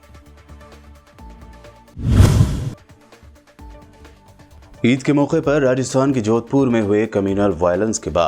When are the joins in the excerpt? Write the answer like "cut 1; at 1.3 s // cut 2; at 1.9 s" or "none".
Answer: cut 1; at 1.2 s